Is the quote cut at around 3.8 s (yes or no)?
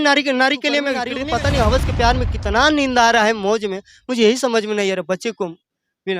no